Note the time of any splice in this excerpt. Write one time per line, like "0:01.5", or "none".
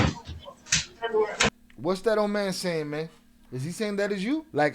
none